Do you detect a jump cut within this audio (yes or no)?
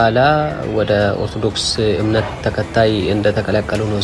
yes